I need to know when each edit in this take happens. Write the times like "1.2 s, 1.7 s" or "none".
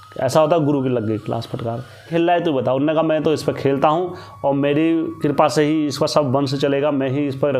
2.1 s